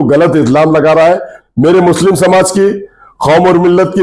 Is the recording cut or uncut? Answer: cut